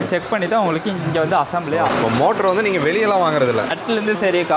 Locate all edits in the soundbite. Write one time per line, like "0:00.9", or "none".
0:01.9
0:03.7